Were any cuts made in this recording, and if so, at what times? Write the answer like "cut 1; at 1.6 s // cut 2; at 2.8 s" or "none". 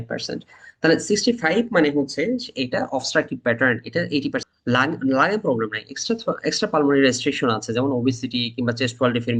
cut 1; at 4.4 s

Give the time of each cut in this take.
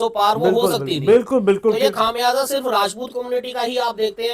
none

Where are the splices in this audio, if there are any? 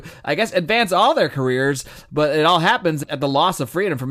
cut 1; at 3.0 s

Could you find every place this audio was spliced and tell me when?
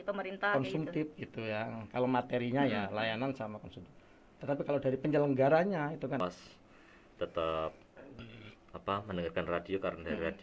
cut 1; at 6.2 s

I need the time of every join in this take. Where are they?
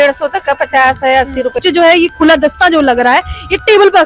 cut 1; at 1.6 s

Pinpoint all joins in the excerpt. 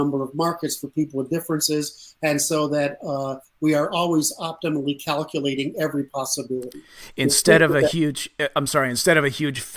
none

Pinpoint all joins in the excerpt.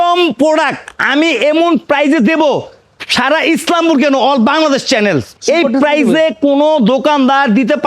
none

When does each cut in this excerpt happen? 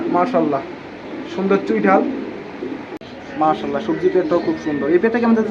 cut 1; at 3.0 s

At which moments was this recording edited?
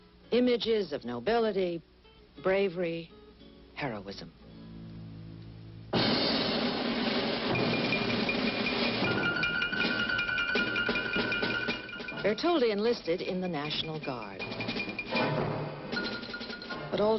cut 1; at 10.9 s

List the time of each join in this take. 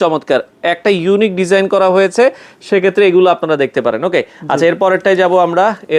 none

